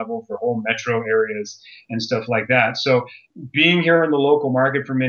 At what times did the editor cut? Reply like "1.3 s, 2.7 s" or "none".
3.2 s